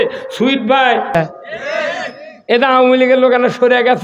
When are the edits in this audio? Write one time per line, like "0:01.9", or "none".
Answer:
0:01.1